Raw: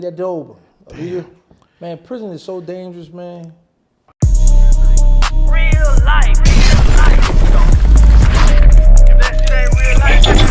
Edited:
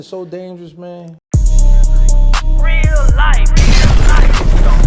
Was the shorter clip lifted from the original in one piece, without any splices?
no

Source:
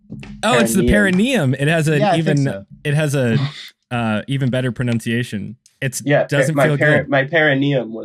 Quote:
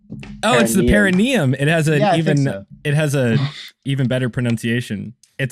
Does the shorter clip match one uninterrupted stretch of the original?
no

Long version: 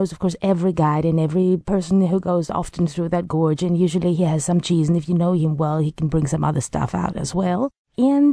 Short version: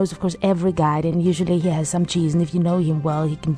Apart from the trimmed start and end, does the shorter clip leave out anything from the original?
yes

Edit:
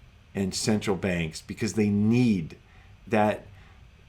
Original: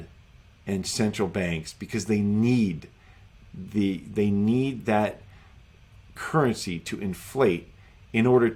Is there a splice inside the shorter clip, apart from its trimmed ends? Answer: yes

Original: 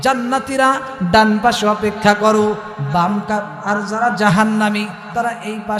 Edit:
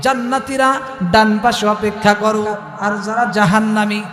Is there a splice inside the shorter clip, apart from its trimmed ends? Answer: yes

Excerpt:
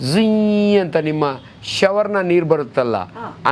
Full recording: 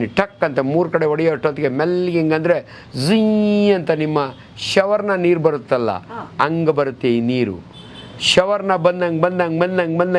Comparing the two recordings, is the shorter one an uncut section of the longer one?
yes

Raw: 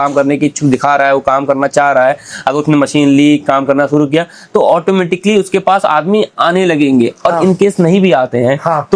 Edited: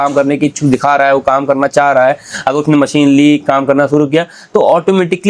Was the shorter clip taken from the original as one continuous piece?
yes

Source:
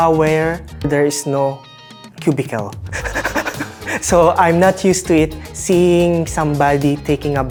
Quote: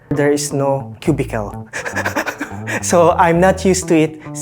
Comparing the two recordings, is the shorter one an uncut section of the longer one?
no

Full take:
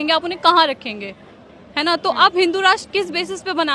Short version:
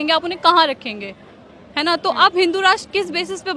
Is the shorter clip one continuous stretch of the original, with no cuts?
yes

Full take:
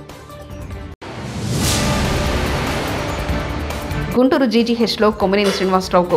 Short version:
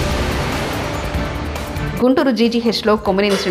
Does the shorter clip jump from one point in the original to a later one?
no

